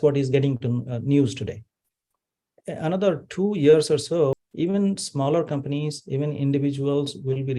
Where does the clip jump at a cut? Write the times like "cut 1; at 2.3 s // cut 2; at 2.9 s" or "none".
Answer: cut 1; at 4.3 s